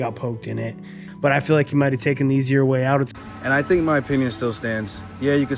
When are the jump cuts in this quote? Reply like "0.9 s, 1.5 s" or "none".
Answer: 3.2 s

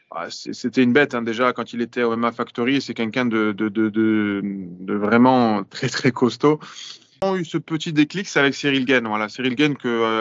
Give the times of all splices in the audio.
7.2 s

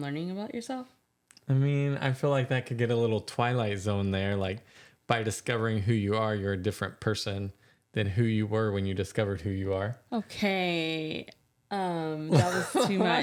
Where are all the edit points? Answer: none

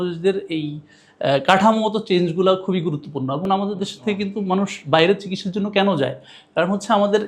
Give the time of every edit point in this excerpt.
3.4 s

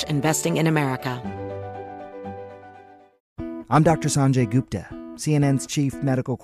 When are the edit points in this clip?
1.2 s, 3.3 s

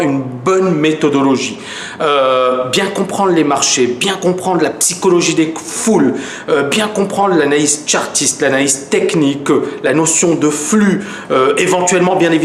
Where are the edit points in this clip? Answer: 9.2 s

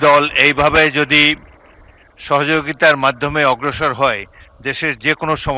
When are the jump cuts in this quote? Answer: none

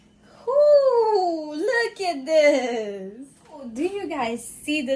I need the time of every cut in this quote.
3.7 s

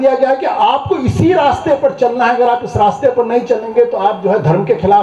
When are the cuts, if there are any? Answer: none

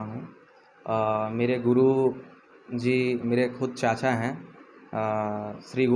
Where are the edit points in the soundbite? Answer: none

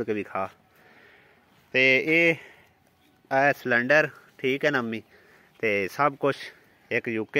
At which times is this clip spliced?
none

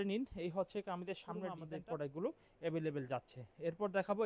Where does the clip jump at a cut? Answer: 1.7 s

